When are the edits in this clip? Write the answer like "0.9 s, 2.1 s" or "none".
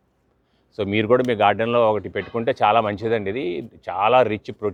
none